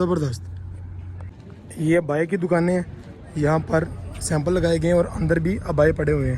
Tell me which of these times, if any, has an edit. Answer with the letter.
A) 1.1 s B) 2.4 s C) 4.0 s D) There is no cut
A